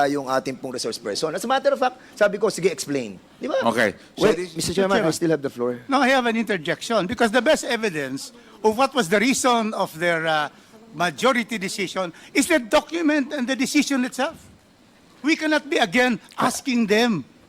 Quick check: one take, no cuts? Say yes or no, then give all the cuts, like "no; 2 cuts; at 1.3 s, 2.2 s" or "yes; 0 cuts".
no; 1 cut; at 4.0 s